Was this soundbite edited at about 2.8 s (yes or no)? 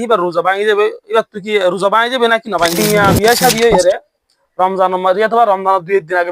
yes